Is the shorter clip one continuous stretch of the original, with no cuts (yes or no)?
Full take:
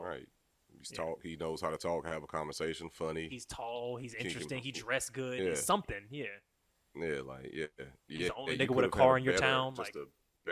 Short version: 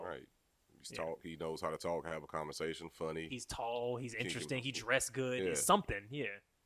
yes